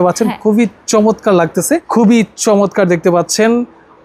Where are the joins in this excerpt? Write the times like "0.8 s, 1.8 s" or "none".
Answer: 1.9 s